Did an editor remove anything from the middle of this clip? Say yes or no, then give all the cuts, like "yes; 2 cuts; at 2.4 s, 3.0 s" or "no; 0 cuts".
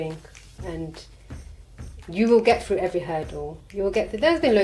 no; 0 cuts